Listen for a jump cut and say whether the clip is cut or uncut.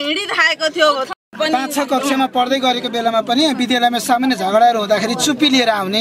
cut